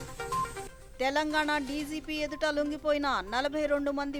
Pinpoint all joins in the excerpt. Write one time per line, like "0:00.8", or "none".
none

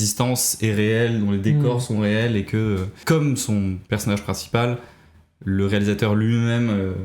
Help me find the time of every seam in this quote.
0:03.0

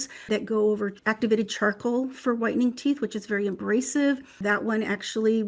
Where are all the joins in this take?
0:01.0

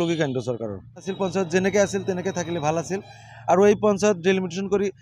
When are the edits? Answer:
0:01.1

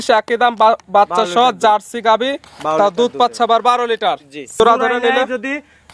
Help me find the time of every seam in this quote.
0:04.6

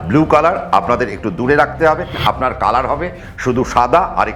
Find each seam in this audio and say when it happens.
0:02.1

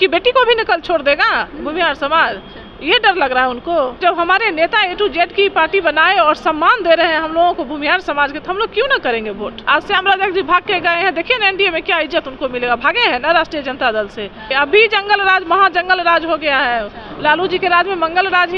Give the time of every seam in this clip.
0:04.0
0:09.5
0:14.4

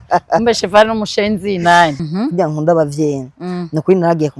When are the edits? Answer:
0:02.1

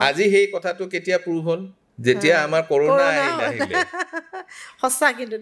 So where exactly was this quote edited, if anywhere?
none

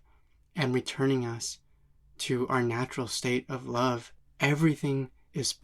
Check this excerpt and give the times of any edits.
0:04.1

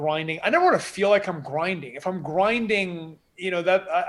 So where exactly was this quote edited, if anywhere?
none

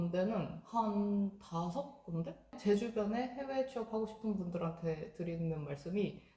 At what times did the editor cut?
0:02.6

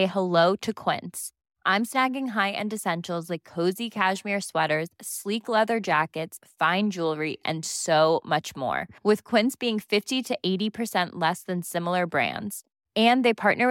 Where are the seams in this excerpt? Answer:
none

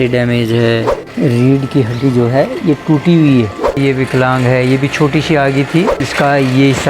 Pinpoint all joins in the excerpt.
0:01.0
0:03.8
0:06.0

